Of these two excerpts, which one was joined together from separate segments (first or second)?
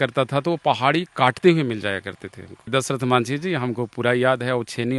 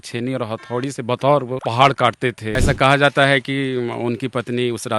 second